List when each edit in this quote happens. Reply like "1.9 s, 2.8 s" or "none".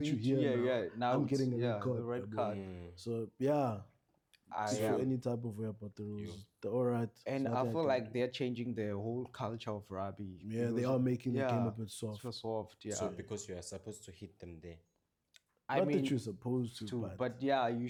none